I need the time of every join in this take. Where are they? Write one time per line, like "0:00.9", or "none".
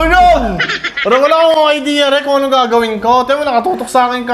none